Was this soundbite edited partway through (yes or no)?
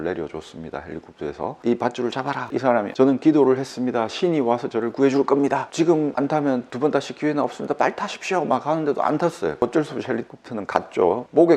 yes